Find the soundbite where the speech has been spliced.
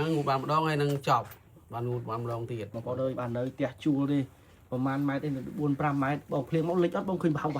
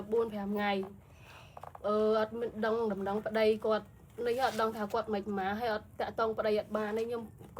first; 1 cut; at 2.8 s

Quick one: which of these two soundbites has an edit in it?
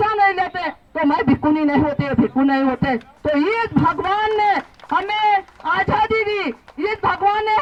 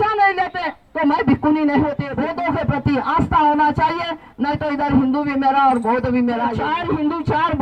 second; 2 cuts; at 2.1 s, 6.6 s

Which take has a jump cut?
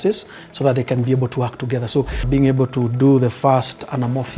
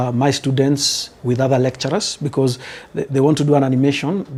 first; 1 cut; at 2.2 s

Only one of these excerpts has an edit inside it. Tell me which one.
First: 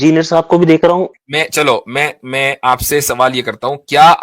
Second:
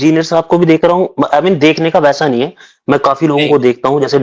first; 1 cut; at 1.1 s

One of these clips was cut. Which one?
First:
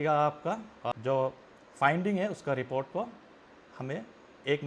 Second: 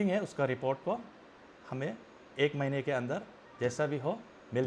first; 1 cut; at 0.9 s

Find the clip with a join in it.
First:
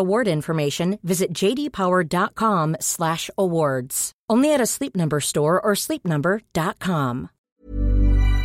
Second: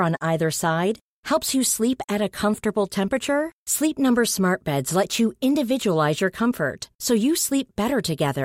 first; 1 cut; at 7.3 s

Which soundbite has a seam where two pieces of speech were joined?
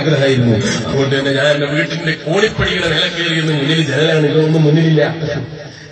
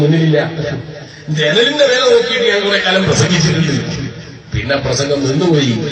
second; 1 cut; at 3.2 s

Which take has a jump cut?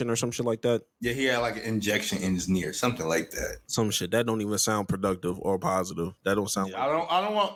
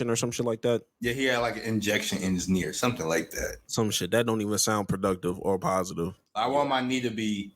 second; 1 cut; at 6.1 s

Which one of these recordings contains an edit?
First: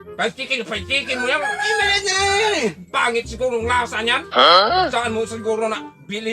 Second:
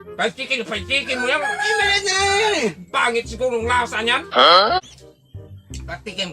second; 1 cut; at 4.8 s

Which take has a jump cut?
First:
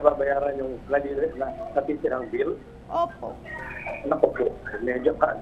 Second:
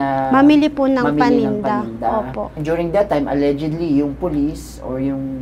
second; 1 cut; at 2.6 s

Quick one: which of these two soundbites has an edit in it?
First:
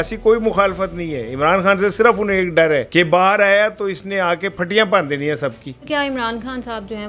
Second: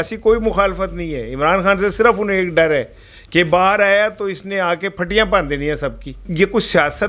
first; 2 cuts; at 2.9 s, 5.7 s

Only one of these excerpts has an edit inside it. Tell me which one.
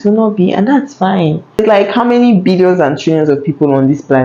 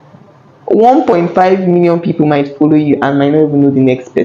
first; 1 cut; at 1.6 s

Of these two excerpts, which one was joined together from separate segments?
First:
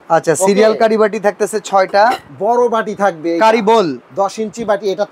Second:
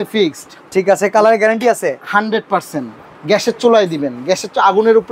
first; 1 cut; at 2.3 s

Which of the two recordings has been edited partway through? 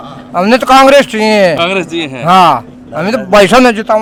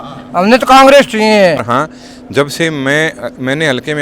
second; 1 cut; at 1.6 s

